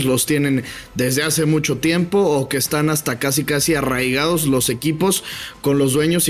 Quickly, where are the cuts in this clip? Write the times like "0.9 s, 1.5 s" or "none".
none